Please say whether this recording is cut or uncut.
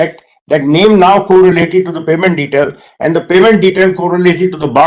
uncut